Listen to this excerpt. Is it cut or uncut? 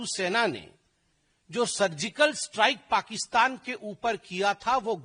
uncut